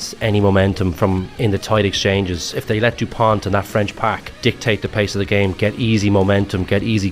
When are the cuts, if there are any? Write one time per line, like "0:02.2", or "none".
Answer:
0:01.3
0:02.4
0:04.3